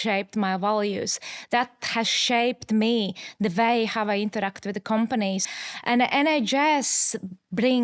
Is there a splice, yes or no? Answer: yes